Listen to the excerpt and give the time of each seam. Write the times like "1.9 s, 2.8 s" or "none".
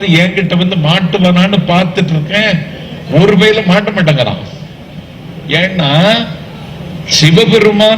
none